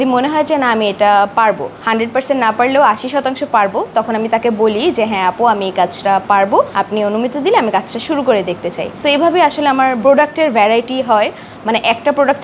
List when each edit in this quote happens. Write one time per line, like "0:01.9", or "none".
none